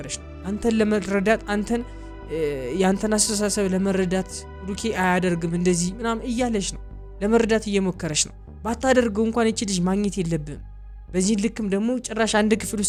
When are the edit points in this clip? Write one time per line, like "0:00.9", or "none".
none

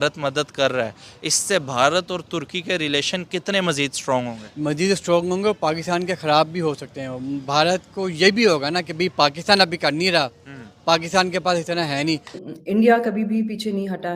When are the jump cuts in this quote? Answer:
0:12.4

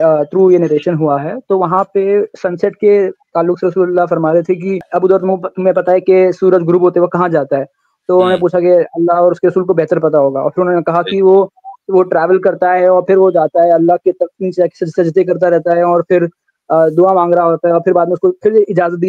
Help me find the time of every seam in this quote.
0:04.8

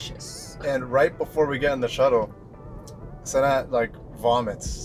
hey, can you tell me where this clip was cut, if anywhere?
none

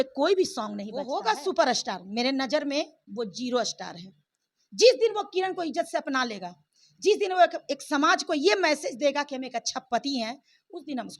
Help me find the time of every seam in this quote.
0:01.0

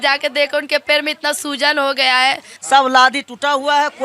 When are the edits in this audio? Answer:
0:02.5

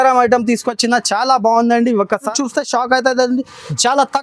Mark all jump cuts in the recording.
0:02.3

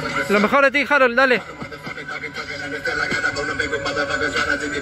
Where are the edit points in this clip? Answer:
none

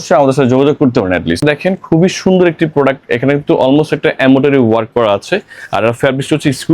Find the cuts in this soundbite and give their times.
0:01.4

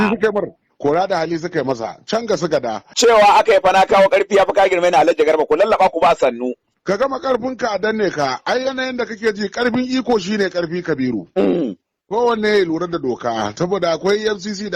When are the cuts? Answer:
0:02.9

